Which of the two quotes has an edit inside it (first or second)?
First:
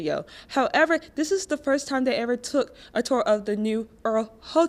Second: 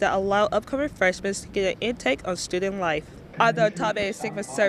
second